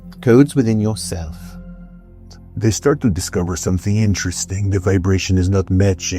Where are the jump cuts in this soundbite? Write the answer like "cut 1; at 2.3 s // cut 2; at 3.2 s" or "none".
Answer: cut 1; at 1.9 s